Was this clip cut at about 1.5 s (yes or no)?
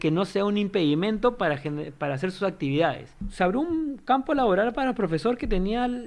no